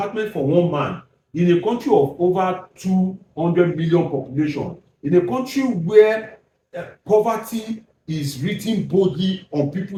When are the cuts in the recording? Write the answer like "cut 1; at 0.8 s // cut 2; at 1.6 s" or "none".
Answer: none